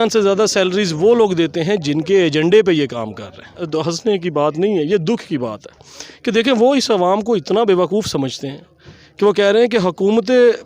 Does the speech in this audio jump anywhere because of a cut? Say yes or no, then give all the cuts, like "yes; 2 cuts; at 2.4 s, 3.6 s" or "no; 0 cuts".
yes; 1 cut; at 3.7 s